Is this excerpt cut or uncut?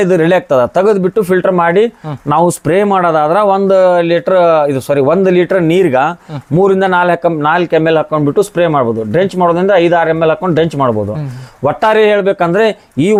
uncut